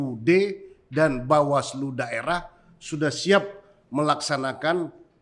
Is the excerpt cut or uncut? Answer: uncut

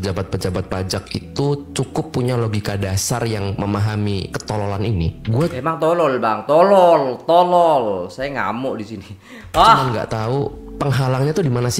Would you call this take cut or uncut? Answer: uncut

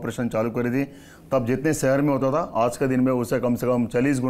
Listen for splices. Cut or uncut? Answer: uncut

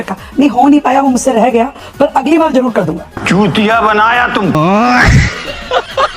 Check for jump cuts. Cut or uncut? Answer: cut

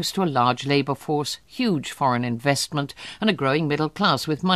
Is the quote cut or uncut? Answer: cut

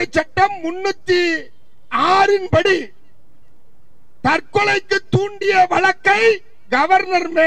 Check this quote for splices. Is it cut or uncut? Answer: uncut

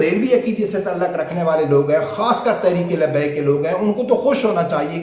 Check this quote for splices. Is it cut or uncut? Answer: uncut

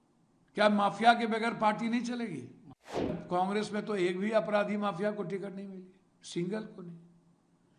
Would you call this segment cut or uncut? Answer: cut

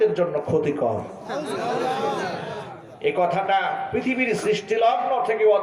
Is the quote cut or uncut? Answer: uncut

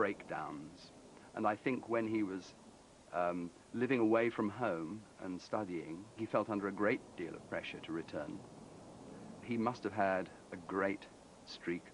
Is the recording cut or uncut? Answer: cut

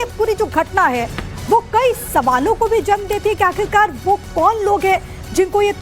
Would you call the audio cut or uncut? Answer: uncut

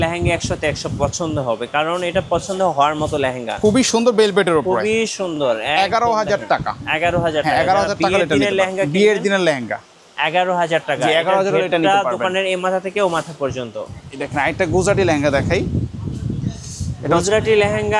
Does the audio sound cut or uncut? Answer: uncut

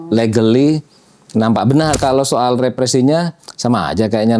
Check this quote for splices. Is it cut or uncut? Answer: cut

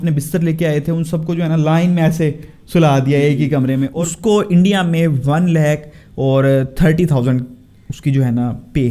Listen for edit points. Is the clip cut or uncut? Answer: cut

